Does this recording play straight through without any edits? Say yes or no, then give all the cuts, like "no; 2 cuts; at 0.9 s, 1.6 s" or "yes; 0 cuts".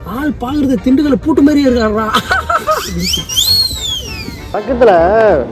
no; 1 cut; at 4.6 s